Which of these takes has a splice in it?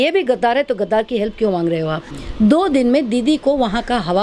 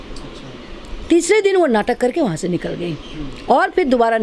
first; 1 cut; at 2.2 s

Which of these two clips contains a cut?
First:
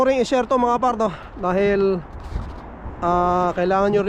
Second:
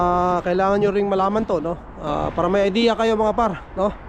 second; 1 cut; at 1.9 s

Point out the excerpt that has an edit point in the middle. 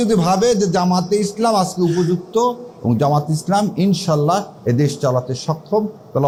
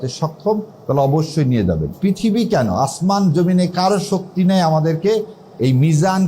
second; 1 cut; at 1.9 s

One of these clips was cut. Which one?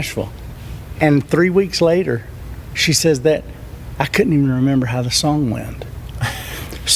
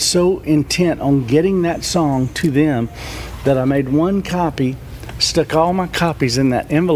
first; 1 cut; at 1.0 s

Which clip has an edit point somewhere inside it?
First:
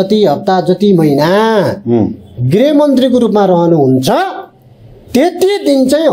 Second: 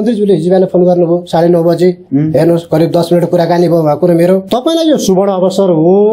second; 1 cut; at 4.4 s

